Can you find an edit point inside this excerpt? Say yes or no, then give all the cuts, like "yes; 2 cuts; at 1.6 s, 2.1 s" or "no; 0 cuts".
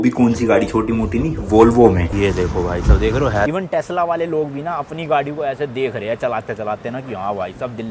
yes; 2 cuts; at 2.1 s, 3.5 s